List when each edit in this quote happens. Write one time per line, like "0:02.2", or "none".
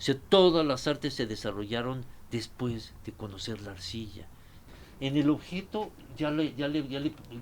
0:04.6